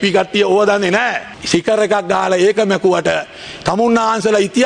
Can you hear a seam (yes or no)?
yes